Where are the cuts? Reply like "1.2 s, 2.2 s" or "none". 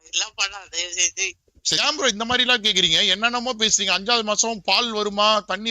1.8 s